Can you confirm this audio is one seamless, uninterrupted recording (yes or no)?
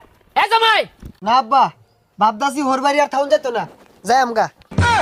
yes